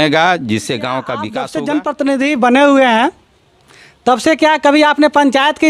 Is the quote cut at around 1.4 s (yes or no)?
yes